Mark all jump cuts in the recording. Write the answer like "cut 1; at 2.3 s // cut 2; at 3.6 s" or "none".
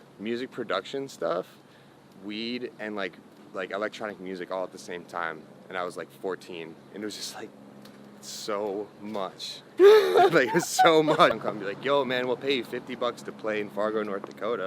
cut 1; at 11.3 s